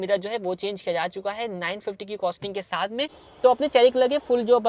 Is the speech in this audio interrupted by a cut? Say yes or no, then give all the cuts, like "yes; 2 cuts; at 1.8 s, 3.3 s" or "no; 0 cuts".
yes; 1 cut; at 3.2 s